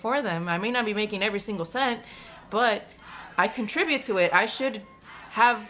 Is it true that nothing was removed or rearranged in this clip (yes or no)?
yes